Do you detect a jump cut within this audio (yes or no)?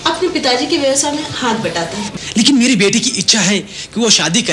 yes